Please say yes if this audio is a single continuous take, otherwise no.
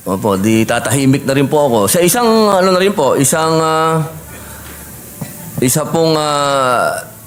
yes